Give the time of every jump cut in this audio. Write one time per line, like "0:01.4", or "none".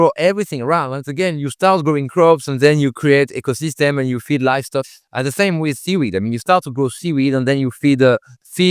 0:04.8